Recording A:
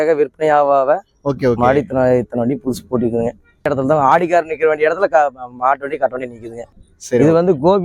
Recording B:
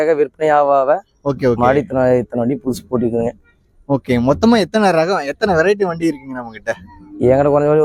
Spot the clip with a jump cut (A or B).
A